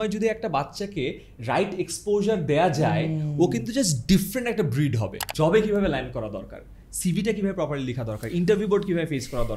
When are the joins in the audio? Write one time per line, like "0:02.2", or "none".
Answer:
0:05.2